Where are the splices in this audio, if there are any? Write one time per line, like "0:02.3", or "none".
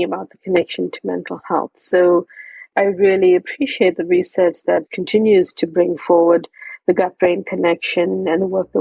0:02.7
0:04.9